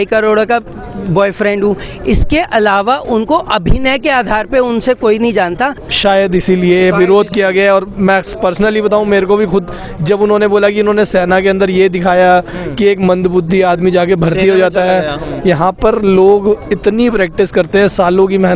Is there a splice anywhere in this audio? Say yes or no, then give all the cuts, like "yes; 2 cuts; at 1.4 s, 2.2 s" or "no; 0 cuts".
yes; 1 cut; at 5.8 s